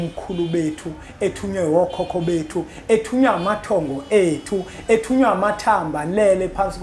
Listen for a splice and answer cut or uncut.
uncut